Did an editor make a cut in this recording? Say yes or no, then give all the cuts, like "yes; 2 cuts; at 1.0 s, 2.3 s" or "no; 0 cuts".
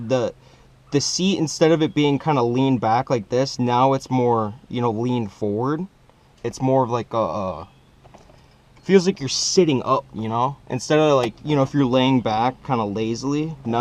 no; 0 cuts